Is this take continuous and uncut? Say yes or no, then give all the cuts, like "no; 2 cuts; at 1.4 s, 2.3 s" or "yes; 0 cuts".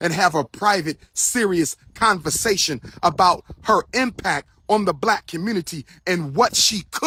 yes; 0 cuts